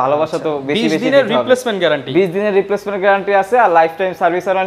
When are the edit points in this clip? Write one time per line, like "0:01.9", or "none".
none